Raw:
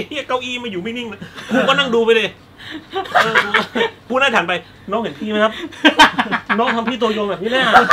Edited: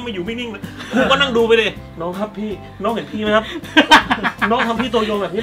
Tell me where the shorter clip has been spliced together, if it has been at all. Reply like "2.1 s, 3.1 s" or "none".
2.5 s